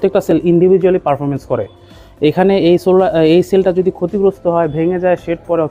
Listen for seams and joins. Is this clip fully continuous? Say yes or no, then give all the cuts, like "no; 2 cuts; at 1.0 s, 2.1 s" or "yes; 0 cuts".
yes; 0 cuts